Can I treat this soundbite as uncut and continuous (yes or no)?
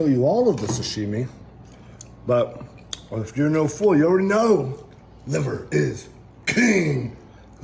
yes